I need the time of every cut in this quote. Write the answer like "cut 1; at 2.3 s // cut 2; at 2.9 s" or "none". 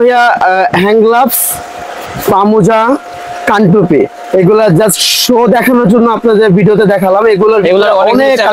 none